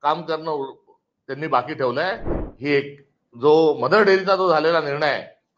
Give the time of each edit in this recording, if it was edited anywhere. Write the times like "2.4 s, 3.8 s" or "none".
2.3 s